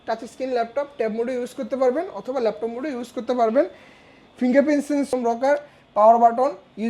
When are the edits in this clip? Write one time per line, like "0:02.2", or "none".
0:05.1